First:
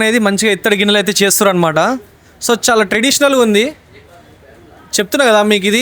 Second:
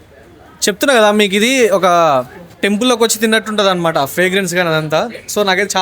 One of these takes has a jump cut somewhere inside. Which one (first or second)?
second